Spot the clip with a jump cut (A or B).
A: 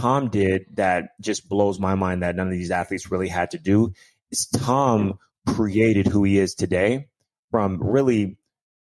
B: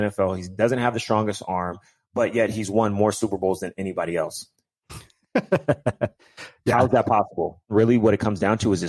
B